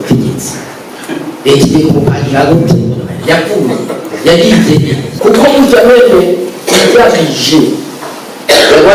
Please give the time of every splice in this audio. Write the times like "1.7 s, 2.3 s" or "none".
5.1 s

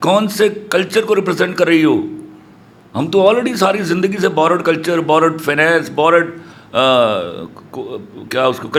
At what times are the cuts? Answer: none

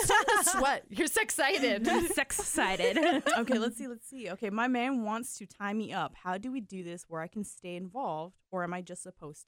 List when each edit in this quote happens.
none

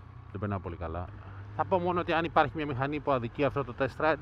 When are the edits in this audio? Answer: 1.1 s

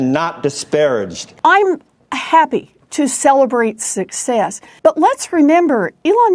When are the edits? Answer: 1.2 s, 4.6 s

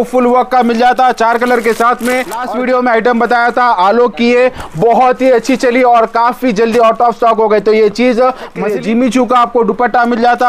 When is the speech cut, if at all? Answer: 2.4 s, 8.6 s

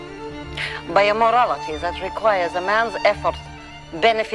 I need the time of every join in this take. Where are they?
none

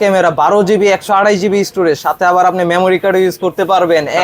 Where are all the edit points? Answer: none

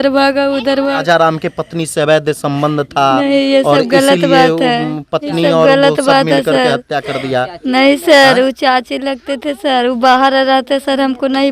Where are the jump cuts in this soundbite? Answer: 1.0 s

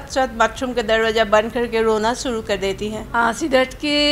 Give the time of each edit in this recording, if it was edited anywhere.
3.1 s

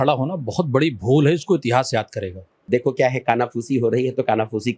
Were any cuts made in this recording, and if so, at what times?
2.6 s

